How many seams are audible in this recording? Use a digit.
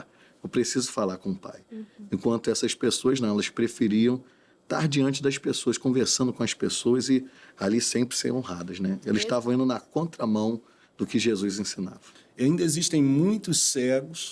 1